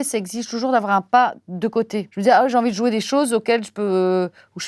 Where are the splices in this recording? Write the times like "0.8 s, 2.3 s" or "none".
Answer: 2.0 s